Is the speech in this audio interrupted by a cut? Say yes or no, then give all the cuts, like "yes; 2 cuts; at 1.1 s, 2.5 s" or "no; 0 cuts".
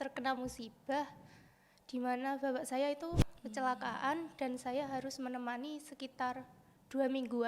no; 0 cuts